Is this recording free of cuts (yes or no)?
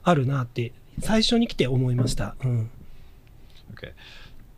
yes